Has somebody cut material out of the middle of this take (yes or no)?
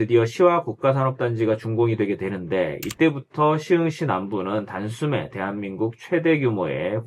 no